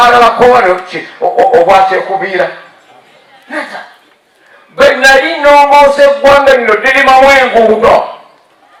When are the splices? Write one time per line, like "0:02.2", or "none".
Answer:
none